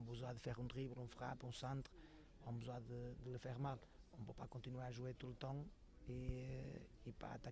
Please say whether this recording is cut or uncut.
uncut